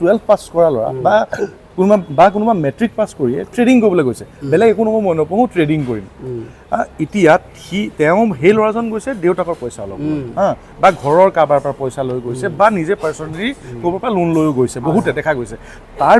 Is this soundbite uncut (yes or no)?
yes